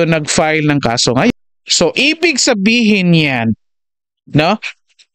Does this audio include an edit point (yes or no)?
yes